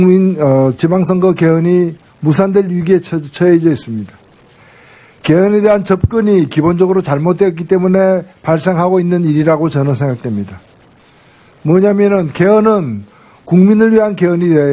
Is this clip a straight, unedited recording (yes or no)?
no